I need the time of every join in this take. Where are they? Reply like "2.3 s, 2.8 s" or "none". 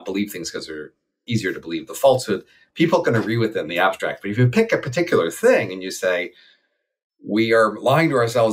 1.2 s